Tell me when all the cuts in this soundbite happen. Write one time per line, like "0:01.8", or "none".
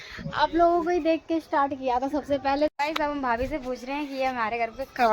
0:02.7